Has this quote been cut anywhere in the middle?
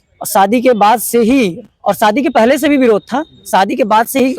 no; 0 cuts

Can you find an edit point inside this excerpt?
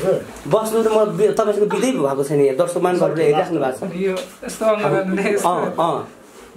no; 0 cuts

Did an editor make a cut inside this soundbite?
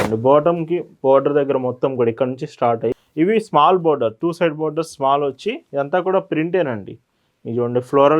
yes; 1 cut; at 2.9 s

